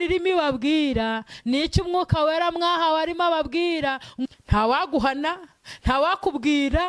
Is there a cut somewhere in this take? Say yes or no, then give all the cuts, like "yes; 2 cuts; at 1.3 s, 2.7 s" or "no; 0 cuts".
yes; 1 cut; at 4.1 s